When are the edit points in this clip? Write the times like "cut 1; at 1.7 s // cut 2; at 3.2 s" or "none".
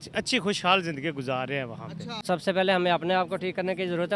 cut 1; at 2.2 s